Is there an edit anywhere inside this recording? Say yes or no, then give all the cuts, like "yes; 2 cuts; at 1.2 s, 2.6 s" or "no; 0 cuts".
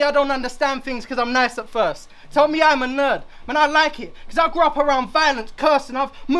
no; 0 cuts